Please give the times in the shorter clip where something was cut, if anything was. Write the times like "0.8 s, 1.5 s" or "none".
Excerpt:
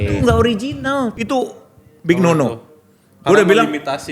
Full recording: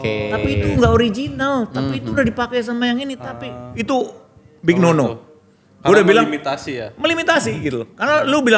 1.1 s